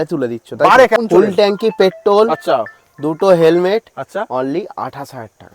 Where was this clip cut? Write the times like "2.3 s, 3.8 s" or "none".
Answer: 1.0 s